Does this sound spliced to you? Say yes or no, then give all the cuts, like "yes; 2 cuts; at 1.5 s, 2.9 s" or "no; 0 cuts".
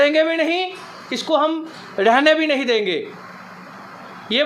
no; 0 cuts